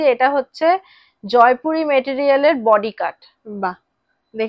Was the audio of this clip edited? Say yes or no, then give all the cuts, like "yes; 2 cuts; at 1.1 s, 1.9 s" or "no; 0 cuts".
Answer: no; 0 cuts